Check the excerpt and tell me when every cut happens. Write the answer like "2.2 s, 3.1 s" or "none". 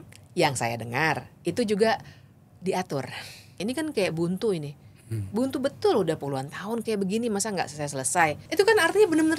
3.6 s, 8.5 s